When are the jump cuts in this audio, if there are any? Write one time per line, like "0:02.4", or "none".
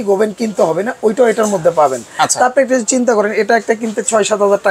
none